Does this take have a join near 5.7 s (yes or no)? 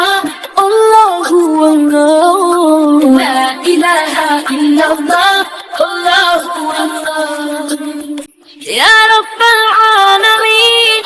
no